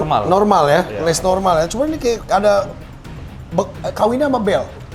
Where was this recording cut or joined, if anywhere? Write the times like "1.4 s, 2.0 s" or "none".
none